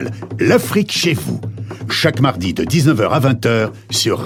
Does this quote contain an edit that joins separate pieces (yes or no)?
no